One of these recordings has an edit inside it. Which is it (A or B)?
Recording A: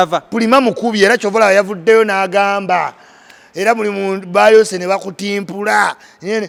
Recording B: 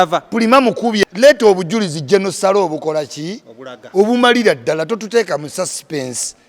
B